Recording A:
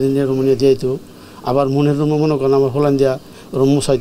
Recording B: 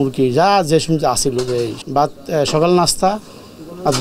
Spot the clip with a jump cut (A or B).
B